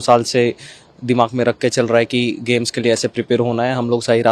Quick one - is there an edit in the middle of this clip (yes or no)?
no